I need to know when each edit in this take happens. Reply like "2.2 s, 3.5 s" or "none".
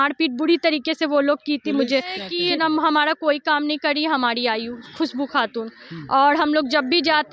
2.3 s

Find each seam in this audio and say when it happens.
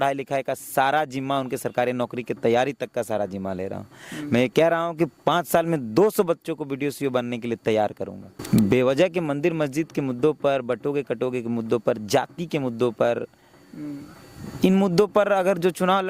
8.3 s

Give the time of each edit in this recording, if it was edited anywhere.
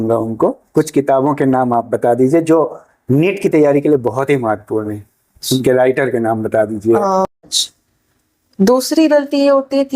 7.3 s

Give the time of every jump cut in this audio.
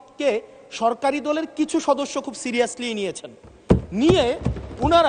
none

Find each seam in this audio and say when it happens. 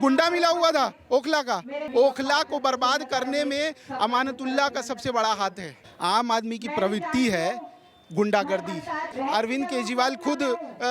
1.8 s, 5.8 s, 9.1 s

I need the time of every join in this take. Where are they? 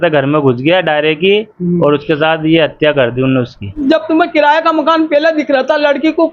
3.8 s

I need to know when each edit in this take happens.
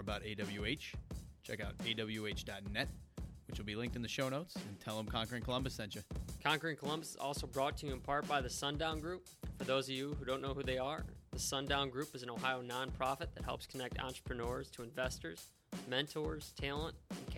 6.3 s

